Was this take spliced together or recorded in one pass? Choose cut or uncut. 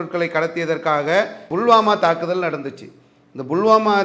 cut